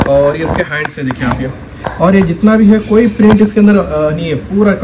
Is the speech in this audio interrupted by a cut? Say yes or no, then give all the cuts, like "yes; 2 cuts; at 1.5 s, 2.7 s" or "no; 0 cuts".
no; 0 cuts